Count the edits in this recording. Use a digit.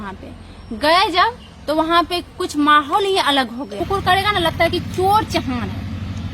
1